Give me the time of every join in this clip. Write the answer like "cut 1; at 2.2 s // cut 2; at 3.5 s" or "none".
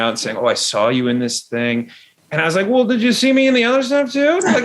none